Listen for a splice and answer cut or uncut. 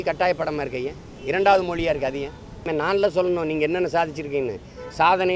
cut